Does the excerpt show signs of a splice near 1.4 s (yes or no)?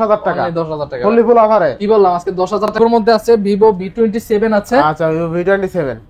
no